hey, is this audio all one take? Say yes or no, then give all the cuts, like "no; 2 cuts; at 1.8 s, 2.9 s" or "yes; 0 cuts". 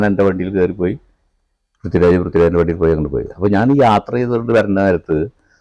yes; 0 cuts